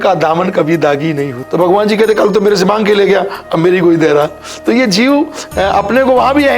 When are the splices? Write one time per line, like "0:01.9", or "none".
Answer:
0:01.4